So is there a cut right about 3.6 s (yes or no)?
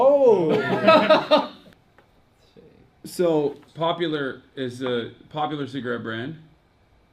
yes